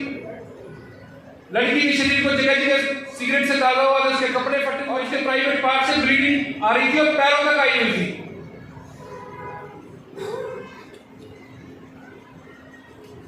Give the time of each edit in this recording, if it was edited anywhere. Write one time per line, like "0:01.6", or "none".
0:04.9